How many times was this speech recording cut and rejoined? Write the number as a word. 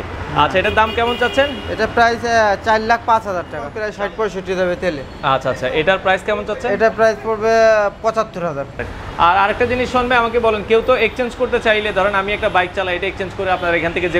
two